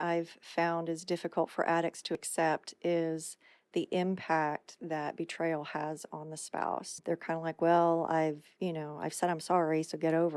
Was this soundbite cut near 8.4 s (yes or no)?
no